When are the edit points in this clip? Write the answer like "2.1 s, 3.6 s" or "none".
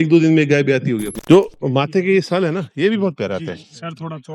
1.1 s

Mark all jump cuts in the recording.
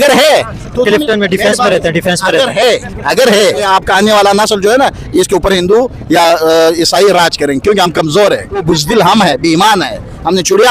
3.6 s, 8.6 s

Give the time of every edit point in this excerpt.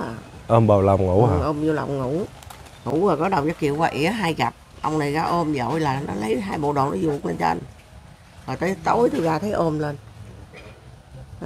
none

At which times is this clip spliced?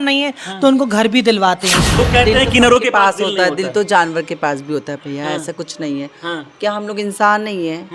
1.8 s

